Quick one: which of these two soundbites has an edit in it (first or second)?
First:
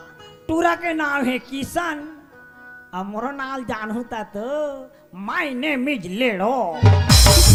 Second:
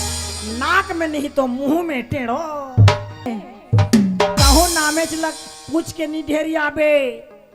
second